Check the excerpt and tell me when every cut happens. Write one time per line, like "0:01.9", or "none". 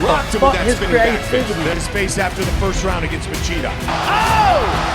0:01.7